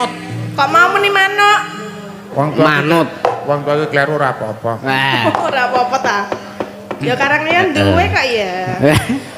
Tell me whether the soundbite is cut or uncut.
uncut